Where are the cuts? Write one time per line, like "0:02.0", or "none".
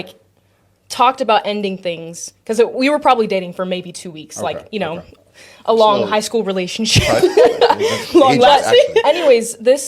0:07.6